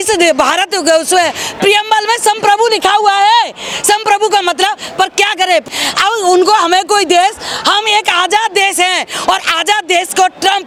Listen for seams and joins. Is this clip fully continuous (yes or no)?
yes